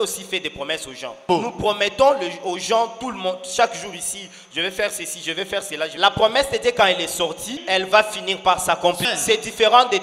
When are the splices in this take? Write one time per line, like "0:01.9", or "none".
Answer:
0:01.2
0:05.9
0:07.6
0:09.0